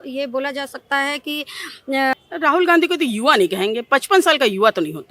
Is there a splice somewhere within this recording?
yes; 1 cut; at 2.1 s

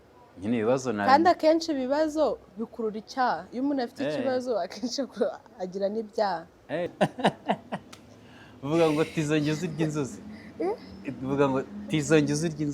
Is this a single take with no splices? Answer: no; 1 cut; at 6.9 s

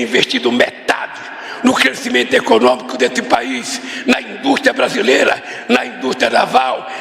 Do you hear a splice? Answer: no; 0 cuts

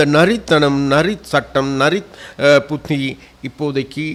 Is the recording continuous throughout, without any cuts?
yes; 0 cuts

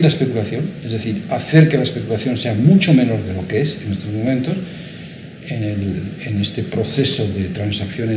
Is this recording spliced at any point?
no; 0 cuts

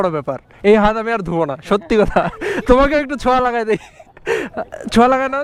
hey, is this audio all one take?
yes; 0 cuts

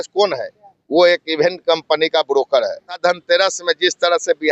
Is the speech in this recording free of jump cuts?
no; 1 cut; at 3.0 s

